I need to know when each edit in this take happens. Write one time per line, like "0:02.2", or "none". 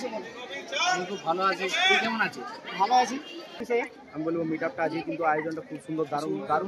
0:03.6

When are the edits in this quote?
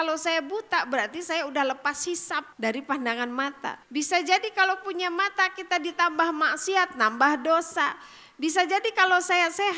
0:02.5
0:03.8

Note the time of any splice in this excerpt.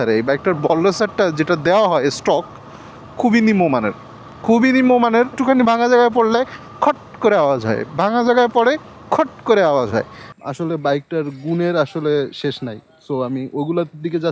0:05.4
0:10.3

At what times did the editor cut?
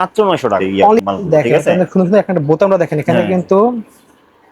0:01.0

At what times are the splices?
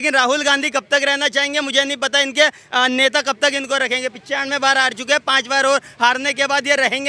none

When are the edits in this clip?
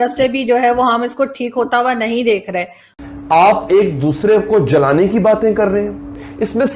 0:02.9

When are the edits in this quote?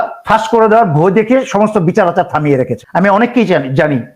0:02.8

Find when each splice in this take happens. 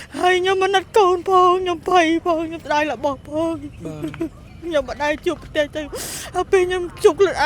none

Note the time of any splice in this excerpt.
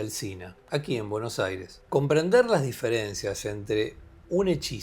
0:01.8

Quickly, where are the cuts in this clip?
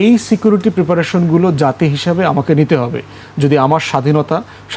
none

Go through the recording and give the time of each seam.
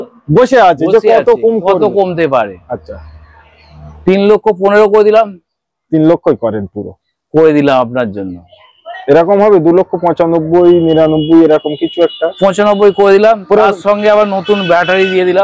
none

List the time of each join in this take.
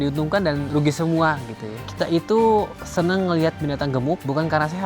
0:01.8

